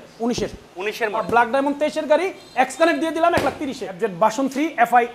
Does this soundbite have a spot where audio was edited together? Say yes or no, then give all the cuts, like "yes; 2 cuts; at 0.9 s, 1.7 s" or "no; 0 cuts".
yes; 2 cuts; at 1.2 s, 3.8 s